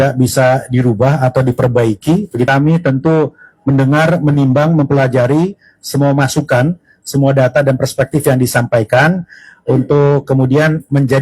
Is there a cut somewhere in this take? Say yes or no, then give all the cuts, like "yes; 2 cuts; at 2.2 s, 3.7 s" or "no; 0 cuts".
yes; 1 cut; at 2.5 s